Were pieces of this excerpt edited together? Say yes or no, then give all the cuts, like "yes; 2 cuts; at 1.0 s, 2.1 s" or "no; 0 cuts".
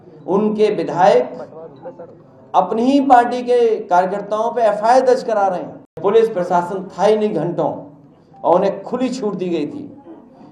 yes; 1 cut; at 6.0 s